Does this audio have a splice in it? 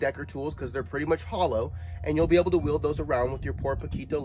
no; 0 cuts

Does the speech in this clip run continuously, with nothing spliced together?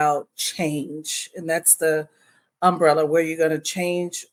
yes; 0 cuts

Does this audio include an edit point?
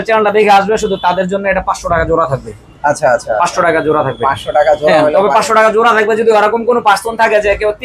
no; 0 cuts

